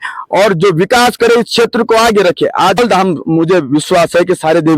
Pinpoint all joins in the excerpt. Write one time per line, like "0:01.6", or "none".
0:02.8